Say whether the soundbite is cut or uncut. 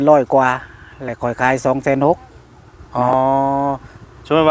uncut